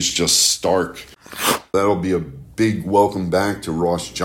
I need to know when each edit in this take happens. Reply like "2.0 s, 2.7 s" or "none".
1.6 s